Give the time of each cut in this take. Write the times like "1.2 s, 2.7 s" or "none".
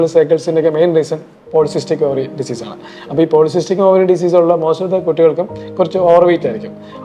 none

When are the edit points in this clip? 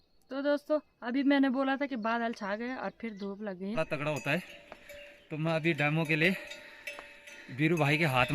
3.8 s

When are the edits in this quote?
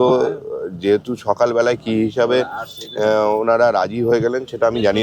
none

